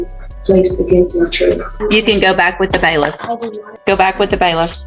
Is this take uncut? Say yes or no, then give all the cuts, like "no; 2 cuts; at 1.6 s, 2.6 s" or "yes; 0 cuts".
no; 2 cuts; at 1.7 s, 3.8 s